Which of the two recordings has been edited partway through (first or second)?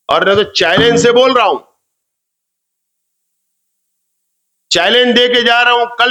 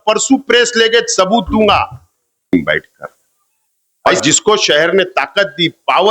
second